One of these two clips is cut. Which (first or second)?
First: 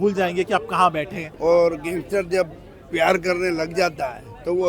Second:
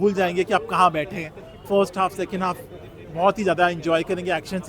first